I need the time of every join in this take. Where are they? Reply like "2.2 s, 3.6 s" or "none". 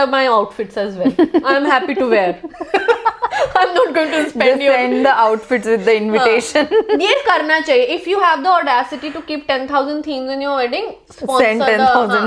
none